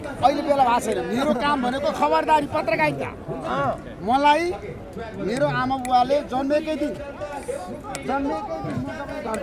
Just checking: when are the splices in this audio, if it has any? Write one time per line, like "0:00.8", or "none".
none